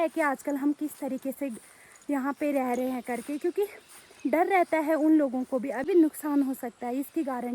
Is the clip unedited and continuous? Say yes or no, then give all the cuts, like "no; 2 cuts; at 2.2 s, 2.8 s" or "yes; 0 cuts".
no; 1 cut; at 5.8 s